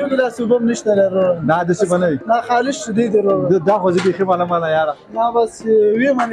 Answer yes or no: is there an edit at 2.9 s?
no